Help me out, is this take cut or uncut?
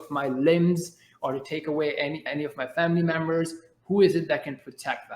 cut